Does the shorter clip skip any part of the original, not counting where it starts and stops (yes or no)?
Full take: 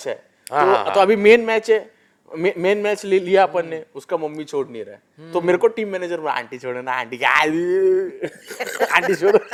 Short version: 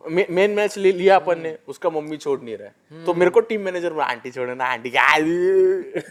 no